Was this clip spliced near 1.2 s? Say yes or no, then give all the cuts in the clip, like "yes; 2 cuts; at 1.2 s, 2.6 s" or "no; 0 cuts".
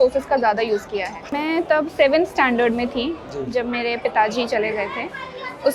yes; 1 cut; at 1.2 s